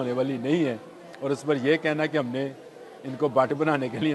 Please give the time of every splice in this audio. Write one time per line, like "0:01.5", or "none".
none

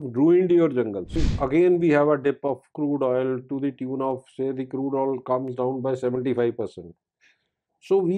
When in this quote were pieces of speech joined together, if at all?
0:01.3

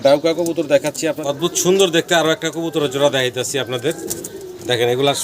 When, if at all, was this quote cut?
0:01.2

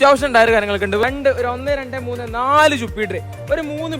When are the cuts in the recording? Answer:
0:01.0

